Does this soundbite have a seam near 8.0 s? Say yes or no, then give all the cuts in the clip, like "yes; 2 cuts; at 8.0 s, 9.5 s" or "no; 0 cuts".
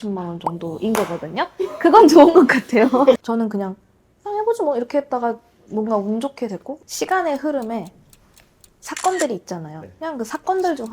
no; 2 cuts; at 3.2 s, 6.7 s